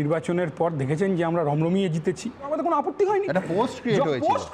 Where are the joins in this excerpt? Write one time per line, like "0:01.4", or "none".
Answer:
0:02.5